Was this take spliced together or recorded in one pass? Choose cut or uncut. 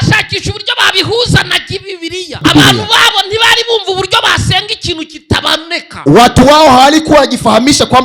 cut